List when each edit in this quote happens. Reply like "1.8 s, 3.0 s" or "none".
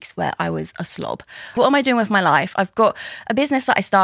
1.5 s